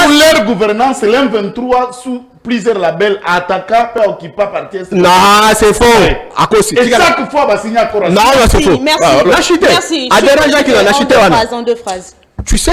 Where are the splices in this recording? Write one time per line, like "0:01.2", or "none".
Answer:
none